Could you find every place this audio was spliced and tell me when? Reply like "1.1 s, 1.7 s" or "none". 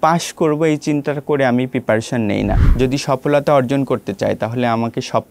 2.6 s